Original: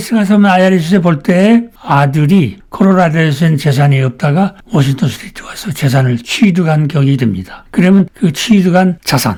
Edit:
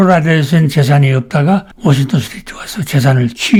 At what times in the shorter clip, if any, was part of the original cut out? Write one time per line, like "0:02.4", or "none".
none